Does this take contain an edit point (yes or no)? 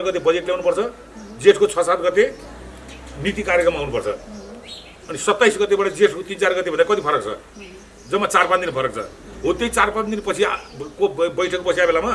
no